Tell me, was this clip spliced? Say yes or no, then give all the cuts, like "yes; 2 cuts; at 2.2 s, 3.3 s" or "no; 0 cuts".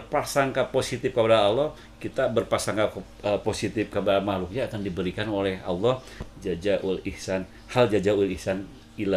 no; 0 cuts